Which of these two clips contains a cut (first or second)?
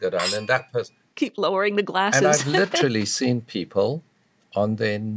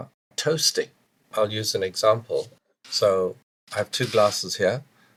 first